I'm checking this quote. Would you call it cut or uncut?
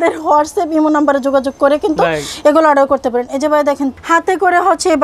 cut